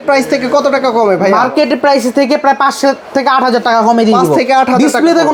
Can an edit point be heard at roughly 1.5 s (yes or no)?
no